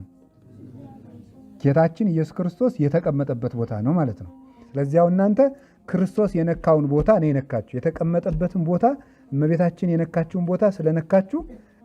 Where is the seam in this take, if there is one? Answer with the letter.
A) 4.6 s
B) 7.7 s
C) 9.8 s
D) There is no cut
A